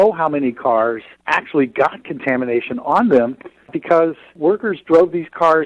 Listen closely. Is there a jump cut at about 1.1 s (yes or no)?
yes